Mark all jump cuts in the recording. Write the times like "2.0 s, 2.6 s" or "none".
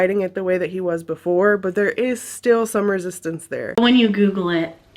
3.8 s

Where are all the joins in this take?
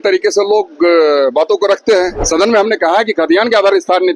2.2 s

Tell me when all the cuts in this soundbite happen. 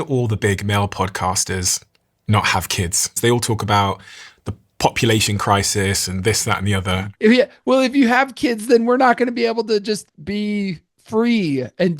3.2 s, 7.0 s

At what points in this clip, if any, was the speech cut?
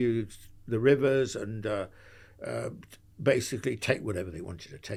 none

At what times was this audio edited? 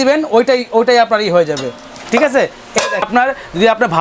3.0 s

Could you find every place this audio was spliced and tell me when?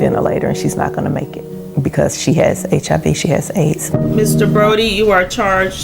4.5 s

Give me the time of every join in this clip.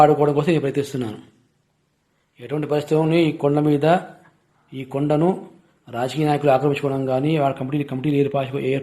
none

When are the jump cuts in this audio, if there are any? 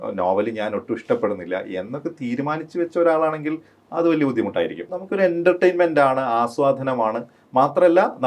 4.9 s

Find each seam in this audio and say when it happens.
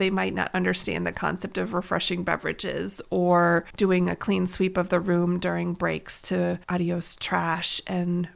3.7 s, 6.6 s

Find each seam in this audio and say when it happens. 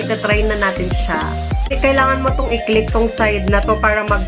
1.7 s

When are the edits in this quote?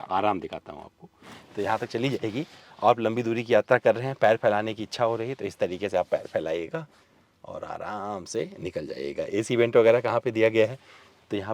none

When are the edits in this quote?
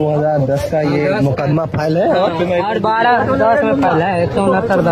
none

